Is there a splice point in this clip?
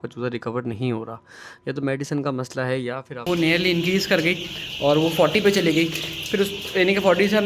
yes; 1 cut; at 3.2 s

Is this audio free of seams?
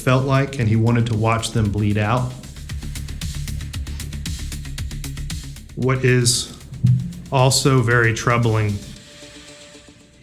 no; 2 cuts; at 3.0 s, 5.6 s

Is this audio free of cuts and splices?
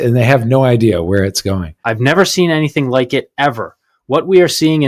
no; 1 cut; at 1.8 s

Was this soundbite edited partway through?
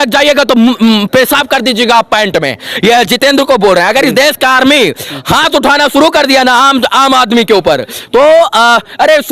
no; 0 cuts

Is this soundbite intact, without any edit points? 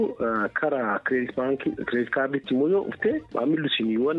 no; 1 cut; at 3.3 s

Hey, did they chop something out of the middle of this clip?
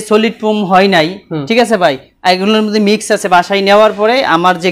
no; 0 cuts

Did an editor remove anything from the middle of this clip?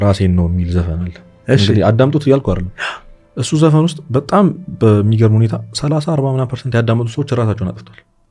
no; 0 cuts

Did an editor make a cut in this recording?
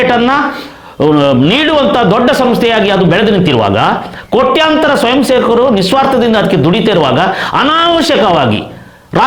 no; 0 cuts

